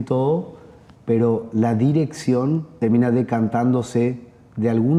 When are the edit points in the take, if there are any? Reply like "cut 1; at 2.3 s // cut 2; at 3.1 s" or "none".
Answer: none